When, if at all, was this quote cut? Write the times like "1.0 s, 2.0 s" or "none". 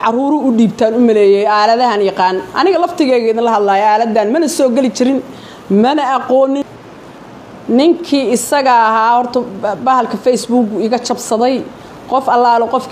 7.4 s